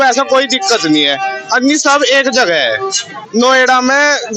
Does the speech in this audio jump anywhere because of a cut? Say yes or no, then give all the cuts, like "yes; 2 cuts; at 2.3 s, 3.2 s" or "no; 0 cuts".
yes; 1 cut; at 3.1 s